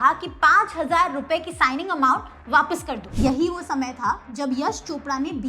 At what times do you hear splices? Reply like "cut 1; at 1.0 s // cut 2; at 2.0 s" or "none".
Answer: cut 1; at 3.0 s